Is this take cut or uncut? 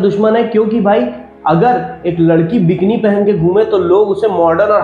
uncut